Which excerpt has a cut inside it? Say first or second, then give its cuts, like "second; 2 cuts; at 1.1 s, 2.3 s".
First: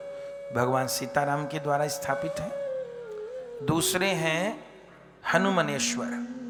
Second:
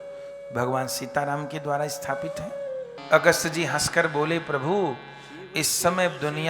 second; 1 cut; at 3.0 s